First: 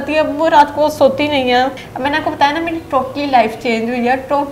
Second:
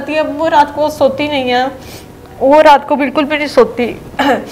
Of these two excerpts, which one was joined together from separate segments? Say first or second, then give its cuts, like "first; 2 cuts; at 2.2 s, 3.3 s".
first; 1 cut; at 1.9 s